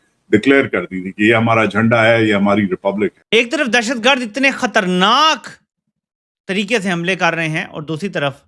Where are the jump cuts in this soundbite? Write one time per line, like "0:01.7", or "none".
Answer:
0:03.2